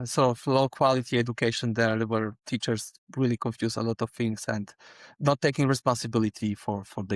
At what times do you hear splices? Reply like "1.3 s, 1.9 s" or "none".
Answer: none

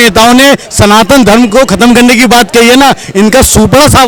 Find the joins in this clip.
none

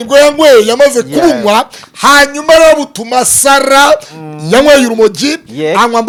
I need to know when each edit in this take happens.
none

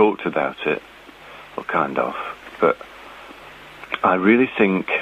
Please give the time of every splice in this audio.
none

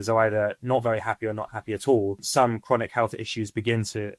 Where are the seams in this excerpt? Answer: none

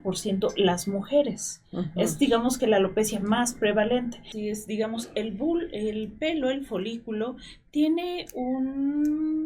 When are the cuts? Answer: 4.2 s

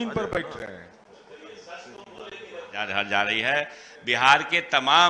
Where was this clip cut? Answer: 2.8 s

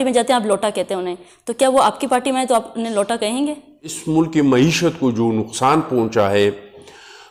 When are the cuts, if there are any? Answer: none

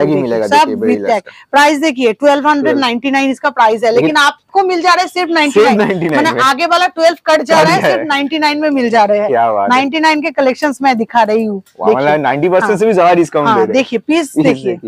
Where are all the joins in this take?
none

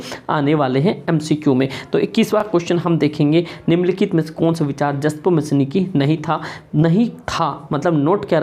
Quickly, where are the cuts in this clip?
none

